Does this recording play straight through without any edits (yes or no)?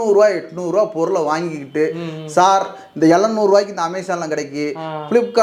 yes